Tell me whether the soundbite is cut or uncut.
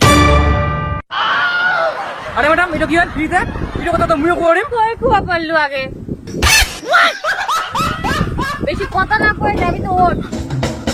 uncut